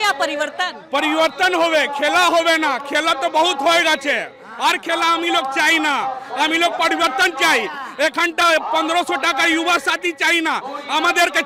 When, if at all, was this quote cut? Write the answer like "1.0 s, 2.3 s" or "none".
none